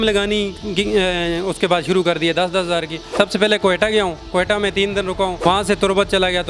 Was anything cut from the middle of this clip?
yes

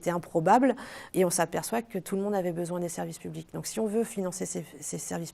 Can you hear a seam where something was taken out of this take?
yes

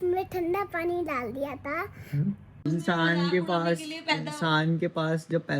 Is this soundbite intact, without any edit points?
no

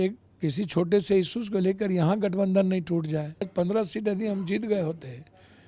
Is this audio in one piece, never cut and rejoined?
no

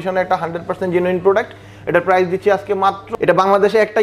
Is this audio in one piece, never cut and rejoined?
no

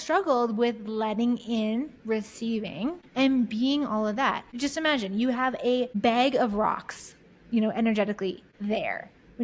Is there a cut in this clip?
yes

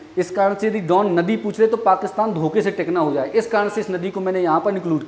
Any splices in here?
no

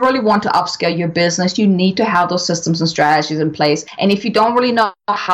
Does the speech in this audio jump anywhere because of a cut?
yes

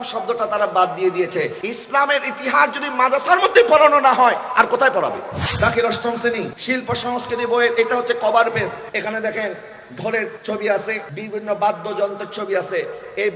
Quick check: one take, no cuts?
no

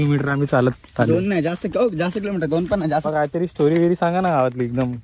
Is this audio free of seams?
no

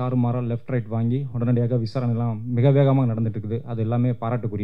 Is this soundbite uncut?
yes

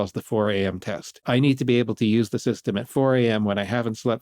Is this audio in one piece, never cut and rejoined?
no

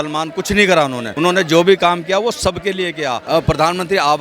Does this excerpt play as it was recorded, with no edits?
no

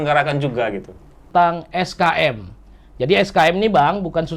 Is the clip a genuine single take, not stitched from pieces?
no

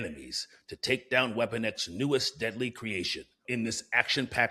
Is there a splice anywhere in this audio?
yes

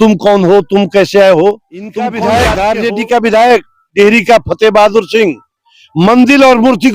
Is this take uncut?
no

